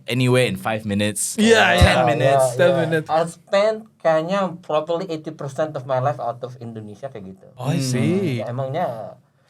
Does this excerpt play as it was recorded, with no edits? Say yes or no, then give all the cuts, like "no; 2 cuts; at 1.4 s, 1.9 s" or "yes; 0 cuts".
no; 3 cuts; at 3.1 s, 7.4 s, 8.4 s